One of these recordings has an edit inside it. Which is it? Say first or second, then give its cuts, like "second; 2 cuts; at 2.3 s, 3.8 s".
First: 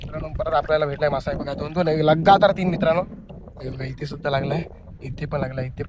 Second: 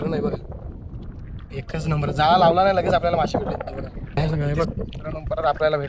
second; 1 cut; at 4.0 s